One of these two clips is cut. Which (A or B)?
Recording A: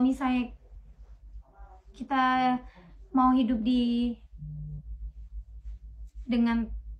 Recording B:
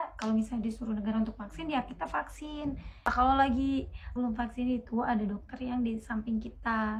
B